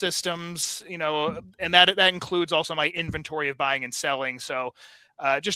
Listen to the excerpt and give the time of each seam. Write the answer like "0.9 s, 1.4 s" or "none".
none